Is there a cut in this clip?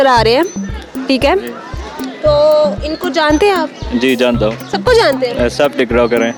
no; 0 cuts

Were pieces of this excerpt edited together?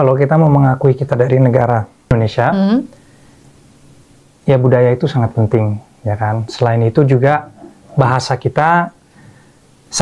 yes; 1 cut; at 2.1 s

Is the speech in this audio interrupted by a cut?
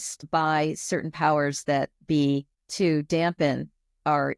yes; 1 cut; at 2.6 s

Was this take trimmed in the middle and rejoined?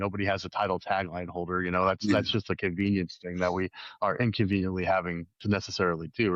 no; 0 cuts

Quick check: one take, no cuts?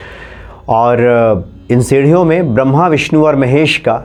yes; 0 cuts

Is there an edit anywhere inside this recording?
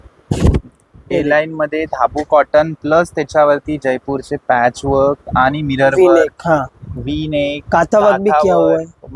no; 0 cuts

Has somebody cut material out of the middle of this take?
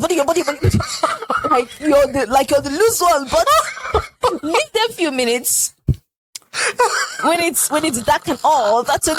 no; 0 cuts

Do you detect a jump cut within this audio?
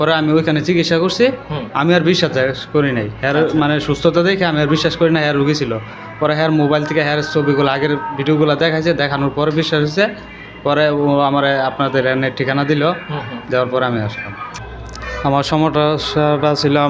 yes; 1 cut; at 14.6 s

